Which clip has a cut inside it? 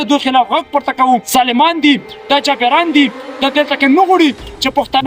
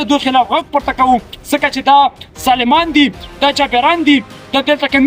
first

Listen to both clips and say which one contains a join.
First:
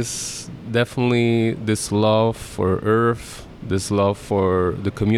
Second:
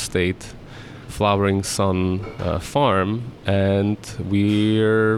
first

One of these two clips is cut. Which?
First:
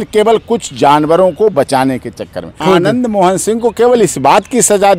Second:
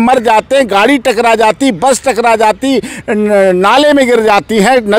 first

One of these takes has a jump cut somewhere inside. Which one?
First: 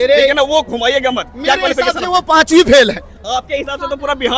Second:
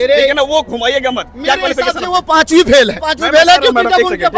second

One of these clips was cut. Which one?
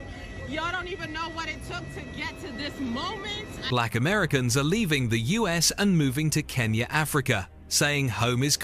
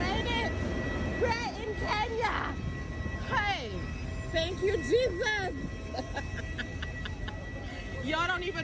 first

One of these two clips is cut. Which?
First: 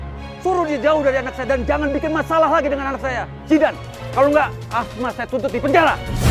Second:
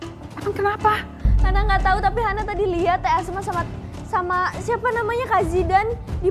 first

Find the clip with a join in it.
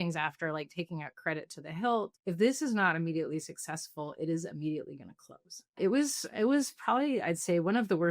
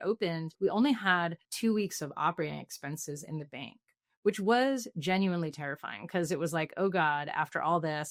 first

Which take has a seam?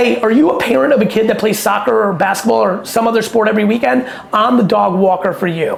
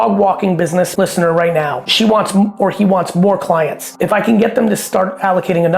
second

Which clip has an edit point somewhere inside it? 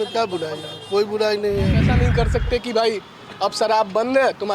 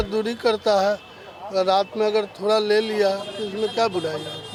first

